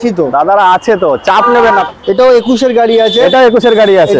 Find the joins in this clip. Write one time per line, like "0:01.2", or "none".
0:01.8